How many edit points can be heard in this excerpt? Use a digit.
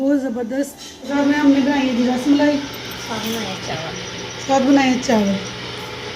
1